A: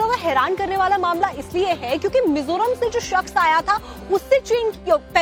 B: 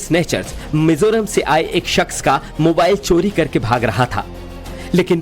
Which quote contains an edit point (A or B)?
B